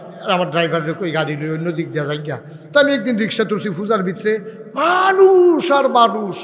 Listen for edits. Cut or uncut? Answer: uncut